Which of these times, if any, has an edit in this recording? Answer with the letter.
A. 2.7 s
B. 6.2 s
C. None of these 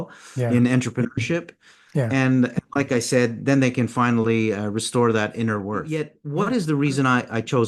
B